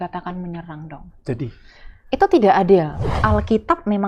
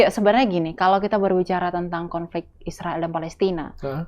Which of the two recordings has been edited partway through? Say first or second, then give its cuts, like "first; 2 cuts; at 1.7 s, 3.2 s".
first; 1 cut; at 3.0 s